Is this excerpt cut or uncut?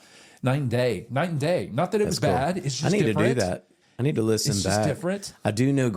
uncut